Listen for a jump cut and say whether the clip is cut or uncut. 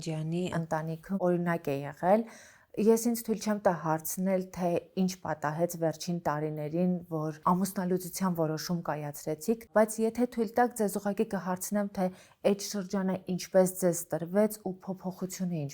cut